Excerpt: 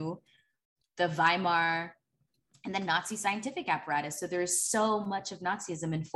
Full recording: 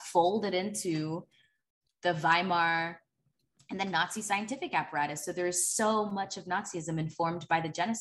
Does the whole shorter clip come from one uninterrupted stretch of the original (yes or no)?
yes